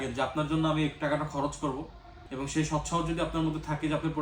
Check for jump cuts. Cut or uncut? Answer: cut